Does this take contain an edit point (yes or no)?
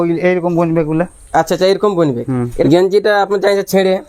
yes